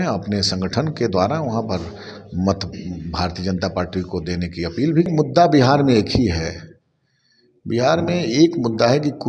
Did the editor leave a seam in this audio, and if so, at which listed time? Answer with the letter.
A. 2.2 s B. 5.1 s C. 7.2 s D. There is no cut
B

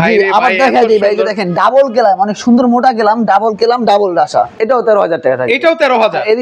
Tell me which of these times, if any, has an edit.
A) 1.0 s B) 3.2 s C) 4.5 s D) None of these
C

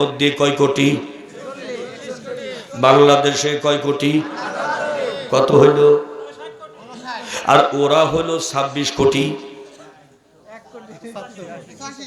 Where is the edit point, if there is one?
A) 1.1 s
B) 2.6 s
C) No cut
C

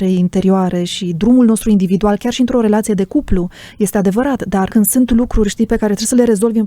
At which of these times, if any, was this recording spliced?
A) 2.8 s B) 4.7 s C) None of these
B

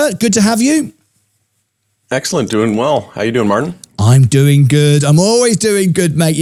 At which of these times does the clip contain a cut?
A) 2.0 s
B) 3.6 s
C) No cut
C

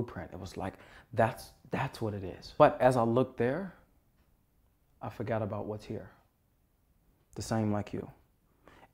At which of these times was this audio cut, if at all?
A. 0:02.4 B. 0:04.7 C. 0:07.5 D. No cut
A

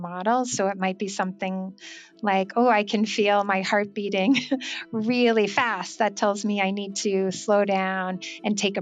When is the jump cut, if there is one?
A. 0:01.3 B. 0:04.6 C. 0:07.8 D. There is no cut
D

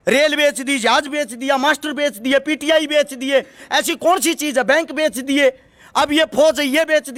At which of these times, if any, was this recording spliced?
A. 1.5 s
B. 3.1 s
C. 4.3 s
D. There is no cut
D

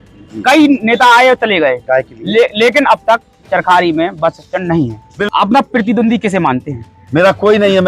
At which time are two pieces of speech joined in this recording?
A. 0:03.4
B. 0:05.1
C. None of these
B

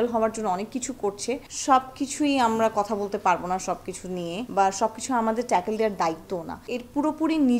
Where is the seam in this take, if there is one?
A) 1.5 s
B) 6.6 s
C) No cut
A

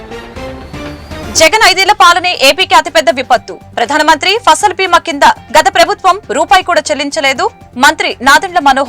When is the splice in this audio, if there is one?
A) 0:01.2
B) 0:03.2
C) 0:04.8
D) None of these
A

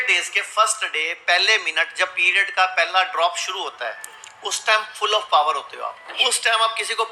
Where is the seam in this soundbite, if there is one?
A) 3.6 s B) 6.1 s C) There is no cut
B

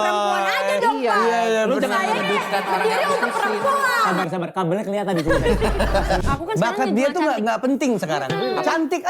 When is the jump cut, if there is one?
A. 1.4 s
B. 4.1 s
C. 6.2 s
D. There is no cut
C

